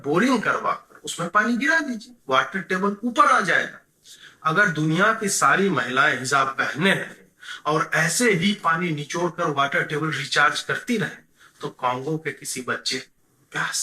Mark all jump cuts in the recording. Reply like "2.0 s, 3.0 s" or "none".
none